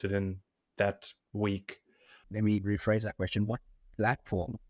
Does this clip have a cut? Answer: yes; 1 cut; at 2.2 s

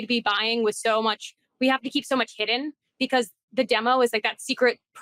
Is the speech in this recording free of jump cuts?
yes; 0 cuts

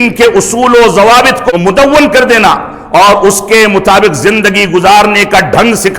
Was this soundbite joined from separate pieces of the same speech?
yes; 1 cut; at 1.4 s

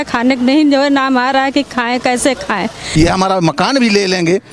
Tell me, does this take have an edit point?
yes; 1 cut; at 2.8 s

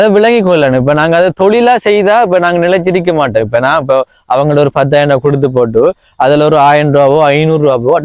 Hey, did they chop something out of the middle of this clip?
no; 0 cuts

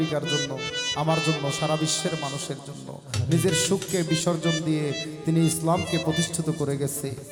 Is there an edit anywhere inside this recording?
no; 0 cuts

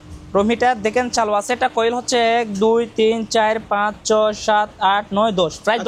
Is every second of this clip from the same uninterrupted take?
yes; 0 cuts

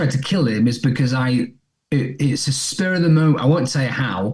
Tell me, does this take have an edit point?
no; 0 cuts

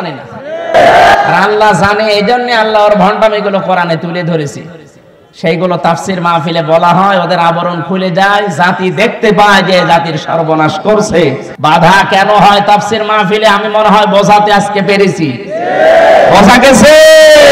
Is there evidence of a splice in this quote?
yes; 1 cut; at 11.5 s

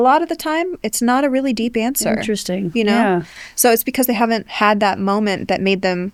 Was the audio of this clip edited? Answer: no; 0 cuts

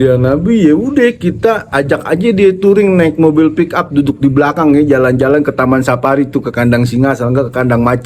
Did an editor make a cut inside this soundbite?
no; 0 cuts

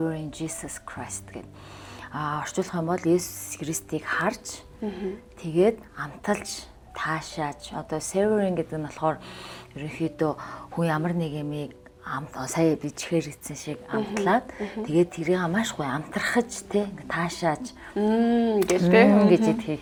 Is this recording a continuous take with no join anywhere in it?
yes; 0 cuts

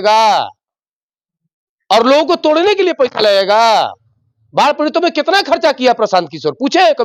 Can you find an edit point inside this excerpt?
no; 0 cuts

